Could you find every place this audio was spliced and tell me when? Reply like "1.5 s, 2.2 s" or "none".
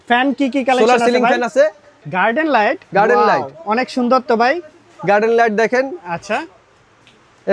2.0 s

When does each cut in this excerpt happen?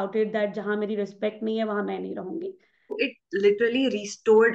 2.9 s

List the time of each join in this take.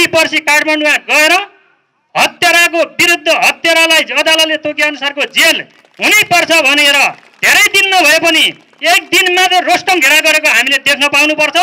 none

